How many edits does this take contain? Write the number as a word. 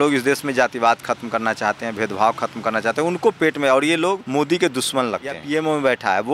two